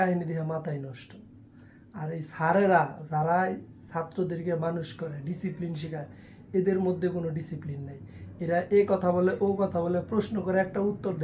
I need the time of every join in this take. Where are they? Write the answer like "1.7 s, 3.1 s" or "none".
none